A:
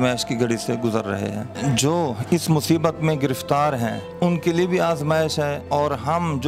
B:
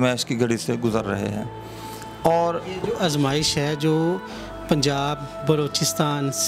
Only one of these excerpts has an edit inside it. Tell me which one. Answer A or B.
A